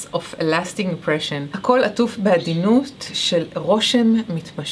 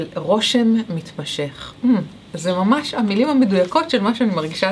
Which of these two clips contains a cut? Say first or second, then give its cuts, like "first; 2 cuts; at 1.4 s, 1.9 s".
first; 1 cut; at 1.5 s